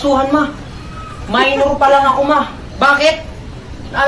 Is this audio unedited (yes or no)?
no